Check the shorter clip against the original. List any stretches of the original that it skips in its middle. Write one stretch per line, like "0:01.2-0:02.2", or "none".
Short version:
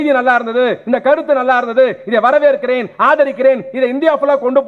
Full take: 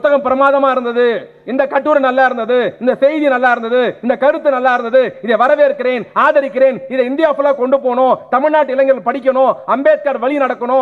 none